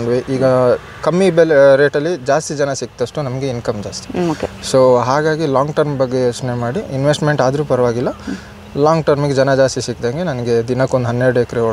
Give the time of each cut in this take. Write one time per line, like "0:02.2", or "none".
none